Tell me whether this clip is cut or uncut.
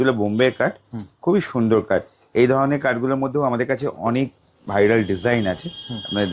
uncut